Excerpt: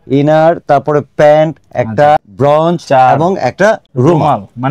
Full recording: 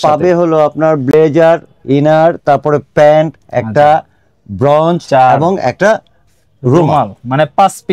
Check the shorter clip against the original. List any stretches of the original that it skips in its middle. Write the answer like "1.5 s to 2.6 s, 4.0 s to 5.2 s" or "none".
4.1 s to 4.5 s, 6.1 s to 6.5 s